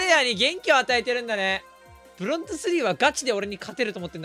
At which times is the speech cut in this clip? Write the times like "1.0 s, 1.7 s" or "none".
none